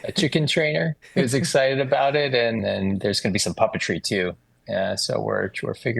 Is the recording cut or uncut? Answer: cut